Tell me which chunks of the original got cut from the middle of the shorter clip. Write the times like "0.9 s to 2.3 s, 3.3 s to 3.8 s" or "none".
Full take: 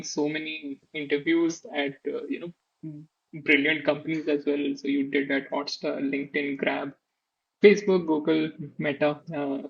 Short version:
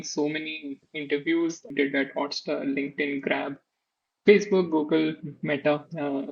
1.7 s to 5.1 s